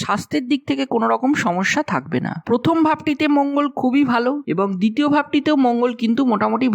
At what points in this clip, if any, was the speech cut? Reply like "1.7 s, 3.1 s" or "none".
none